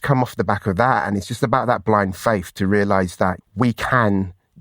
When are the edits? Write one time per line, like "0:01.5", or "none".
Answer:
0:03.4